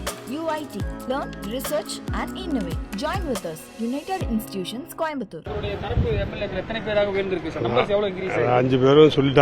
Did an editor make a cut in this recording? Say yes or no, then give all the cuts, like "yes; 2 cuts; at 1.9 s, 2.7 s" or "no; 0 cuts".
yes; 1 cut; at 5.4 s